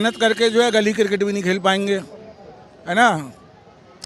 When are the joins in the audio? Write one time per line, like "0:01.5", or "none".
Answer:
none